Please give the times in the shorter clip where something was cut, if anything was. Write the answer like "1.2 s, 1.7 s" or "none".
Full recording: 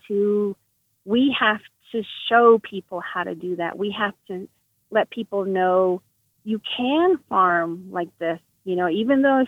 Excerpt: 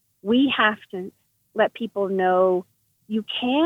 0.9 s